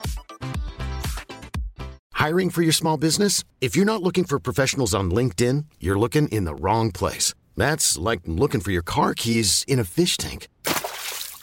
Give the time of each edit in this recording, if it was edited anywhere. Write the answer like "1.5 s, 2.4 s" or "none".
2.0 s

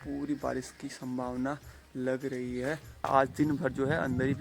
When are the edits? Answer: 3.1 s

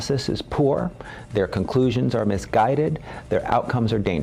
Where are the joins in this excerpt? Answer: none

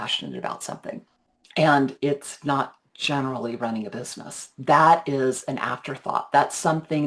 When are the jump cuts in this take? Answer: 1.1 s

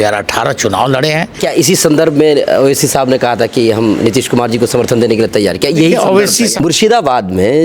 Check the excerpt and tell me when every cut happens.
1.4 s, 6.6 s

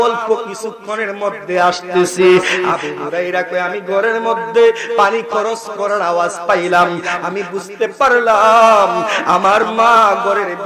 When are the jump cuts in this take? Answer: none

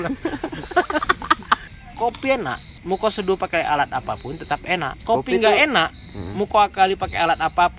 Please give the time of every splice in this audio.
1.6 s, 2.7 s, 4.9 s

